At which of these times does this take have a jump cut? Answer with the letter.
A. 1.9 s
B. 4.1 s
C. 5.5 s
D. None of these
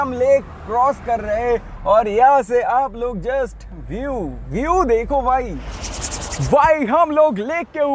D